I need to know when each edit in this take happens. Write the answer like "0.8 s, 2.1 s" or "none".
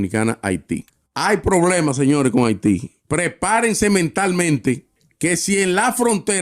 none